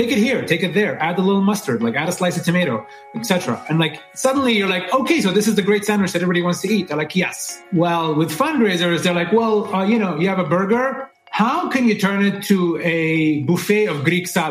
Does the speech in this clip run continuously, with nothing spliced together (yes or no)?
no